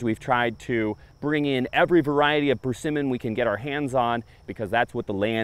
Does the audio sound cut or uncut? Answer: cut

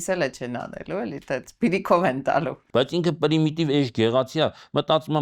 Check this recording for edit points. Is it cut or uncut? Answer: cut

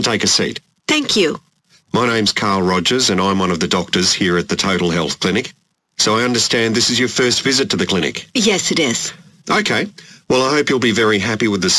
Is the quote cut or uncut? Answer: uncut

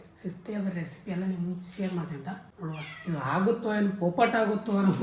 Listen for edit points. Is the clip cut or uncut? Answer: cut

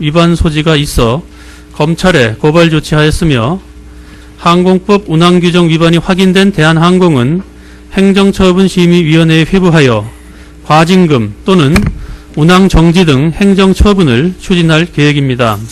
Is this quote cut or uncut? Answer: cut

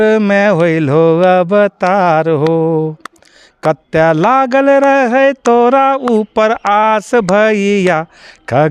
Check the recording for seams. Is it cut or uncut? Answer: uncut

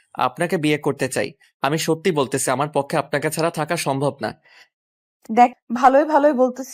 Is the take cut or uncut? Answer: cut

